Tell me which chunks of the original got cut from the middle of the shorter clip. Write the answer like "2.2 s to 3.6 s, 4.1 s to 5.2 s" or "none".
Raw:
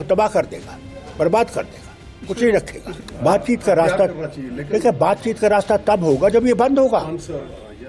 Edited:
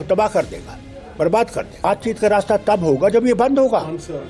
1.8 s to 5.0 s